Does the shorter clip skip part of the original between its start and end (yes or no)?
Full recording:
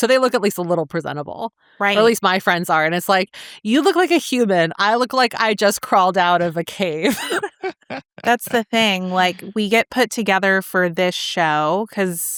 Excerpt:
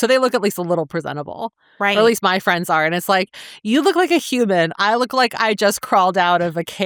no